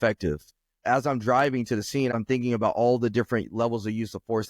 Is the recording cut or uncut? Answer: cut